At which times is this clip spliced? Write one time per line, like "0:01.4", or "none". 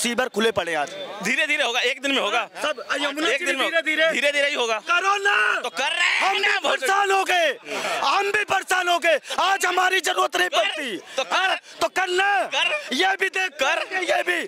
none

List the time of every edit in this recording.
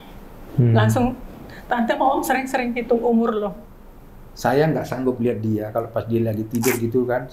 0:03.6

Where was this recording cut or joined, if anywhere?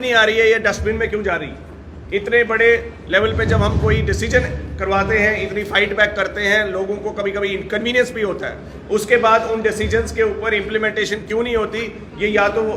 none

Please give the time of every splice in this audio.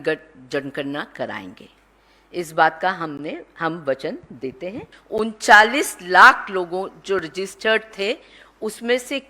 0:04.9

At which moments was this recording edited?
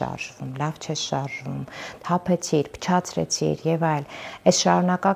none

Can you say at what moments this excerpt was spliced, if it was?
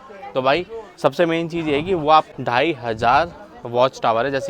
0:02.3

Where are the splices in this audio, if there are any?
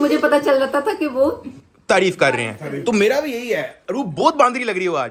none

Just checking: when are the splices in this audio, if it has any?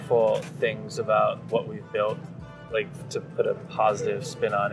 none

